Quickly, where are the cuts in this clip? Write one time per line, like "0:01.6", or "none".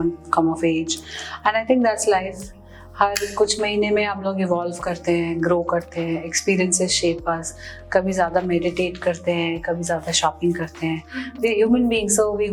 none